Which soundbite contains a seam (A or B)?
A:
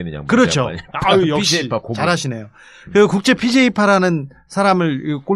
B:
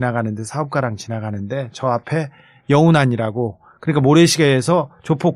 B